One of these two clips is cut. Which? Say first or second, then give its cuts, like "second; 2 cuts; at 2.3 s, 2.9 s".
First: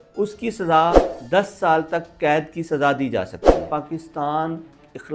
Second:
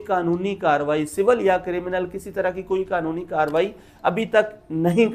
first; 2 cuts; at 1.1 s, 3.7 s